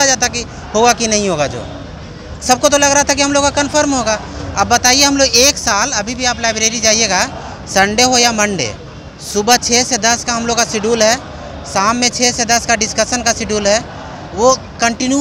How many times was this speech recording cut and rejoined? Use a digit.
0